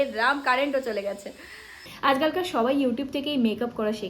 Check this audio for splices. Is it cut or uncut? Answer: cut